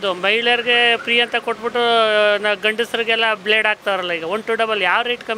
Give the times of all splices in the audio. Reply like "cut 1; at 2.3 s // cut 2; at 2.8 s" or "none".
none